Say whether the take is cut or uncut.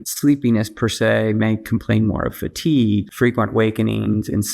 cut